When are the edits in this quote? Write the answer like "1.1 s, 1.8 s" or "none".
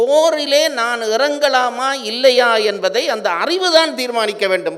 none